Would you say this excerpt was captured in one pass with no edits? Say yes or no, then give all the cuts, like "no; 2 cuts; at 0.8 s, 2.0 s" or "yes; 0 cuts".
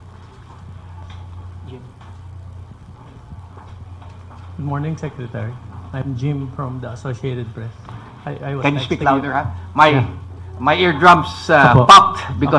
no; 1 cut; at 3.5 s